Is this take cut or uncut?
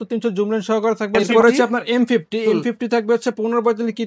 cut